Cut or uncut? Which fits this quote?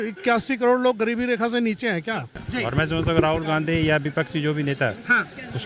cut